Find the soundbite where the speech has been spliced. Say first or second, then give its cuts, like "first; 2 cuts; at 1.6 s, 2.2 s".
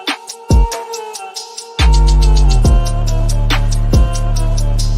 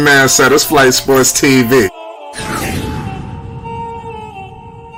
first; 1 cut; at 1.1 s